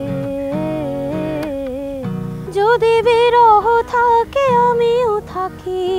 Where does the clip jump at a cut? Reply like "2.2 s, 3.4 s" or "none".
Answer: 2.4 s